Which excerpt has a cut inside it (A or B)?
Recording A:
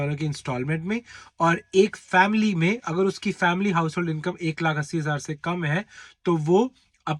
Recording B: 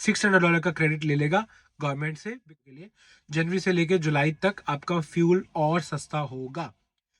B